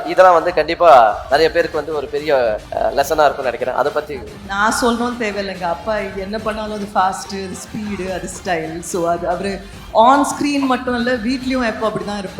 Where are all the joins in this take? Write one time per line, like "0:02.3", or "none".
0:02.6

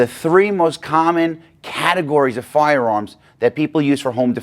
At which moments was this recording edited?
none

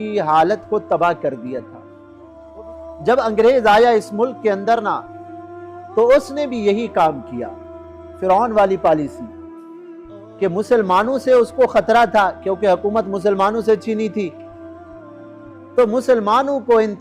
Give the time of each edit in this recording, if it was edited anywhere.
0:02.3

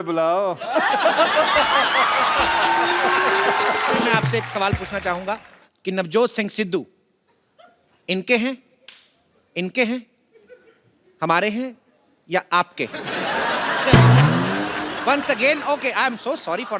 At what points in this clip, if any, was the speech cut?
0:04.1

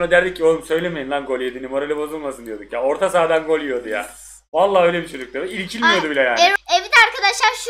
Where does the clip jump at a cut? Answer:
0:06.5

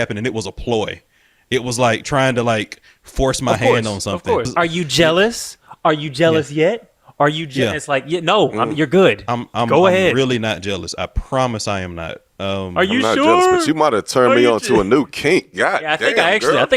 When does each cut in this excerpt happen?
0:04.5

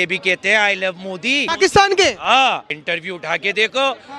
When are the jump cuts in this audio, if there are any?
0:01.4
0:02.7

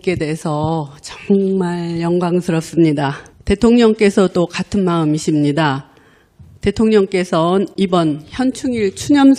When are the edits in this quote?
0:08.4

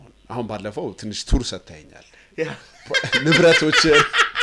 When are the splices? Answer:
none

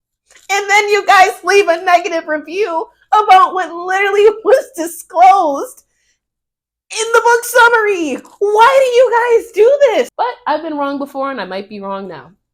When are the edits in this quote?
0:10.1

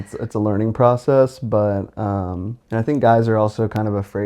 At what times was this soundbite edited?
0:02.5

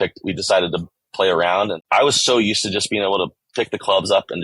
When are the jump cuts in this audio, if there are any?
0:01.8

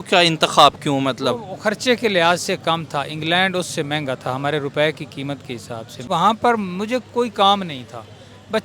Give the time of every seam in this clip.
0:06.0

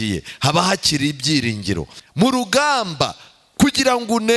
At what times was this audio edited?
0:02.0

